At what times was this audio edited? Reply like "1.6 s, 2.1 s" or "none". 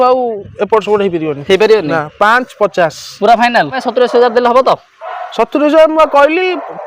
3.8 s